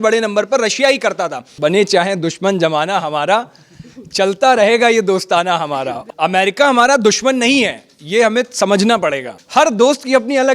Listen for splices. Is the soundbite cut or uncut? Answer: cut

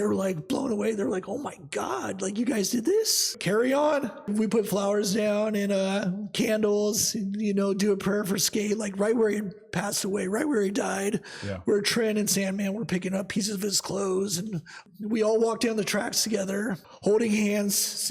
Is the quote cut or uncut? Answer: cut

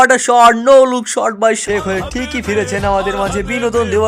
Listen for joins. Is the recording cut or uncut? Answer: cut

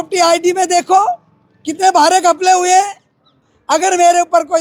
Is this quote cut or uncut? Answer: cut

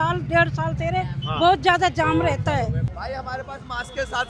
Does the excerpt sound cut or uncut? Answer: cut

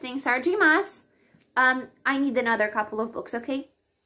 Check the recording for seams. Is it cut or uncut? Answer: uncut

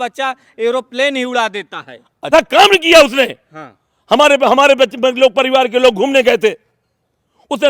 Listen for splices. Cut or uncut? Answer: cut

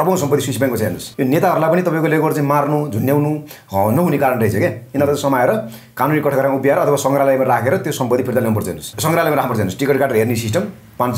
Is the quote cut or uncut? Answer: cut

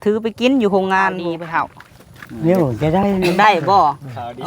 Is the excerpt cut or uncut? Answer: cut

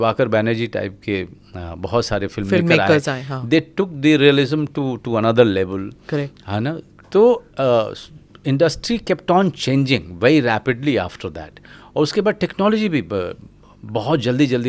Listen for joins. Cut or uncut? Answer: uncut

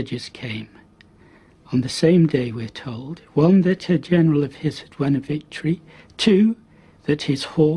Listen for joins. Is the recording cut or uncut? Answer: cut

